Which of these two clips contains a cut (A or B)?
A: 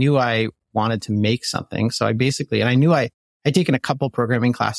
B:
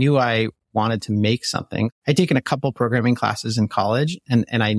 B